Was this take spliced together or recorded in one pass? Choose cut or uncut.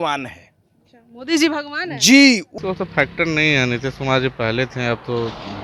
cut